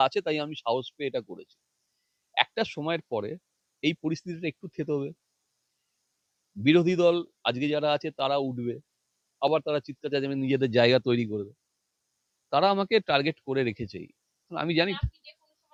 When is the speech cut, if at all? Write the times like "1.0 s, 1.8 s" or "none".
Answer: none